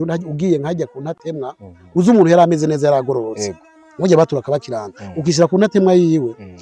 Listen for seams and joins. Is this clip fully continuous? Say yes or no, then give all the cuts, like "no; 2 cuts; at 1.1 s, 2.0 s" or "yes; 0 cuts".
yes; 0 cuts